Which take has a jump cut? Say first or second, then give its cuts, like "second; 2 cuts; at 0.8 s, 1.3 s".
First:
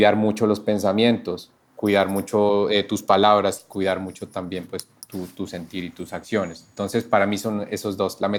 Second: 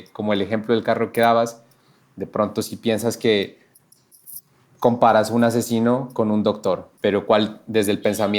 second; 1 cut; at 6.9 s